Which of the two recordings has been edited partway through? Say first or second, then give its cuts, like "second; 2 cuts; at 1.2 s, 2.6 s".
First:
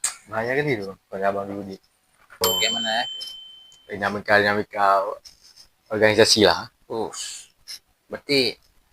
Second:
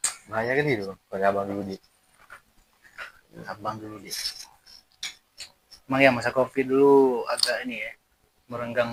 first; 1 cut; at 2.4 s